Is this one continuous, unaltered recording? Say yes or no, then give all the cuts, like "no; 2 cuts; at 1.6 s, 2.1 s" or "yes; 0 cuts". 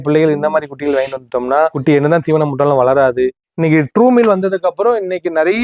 no; 2 cuts; at 1.8 s, 3.4 s